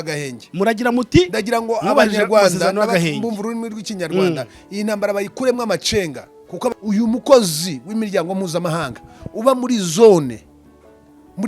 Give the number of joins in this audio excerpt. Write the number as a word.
one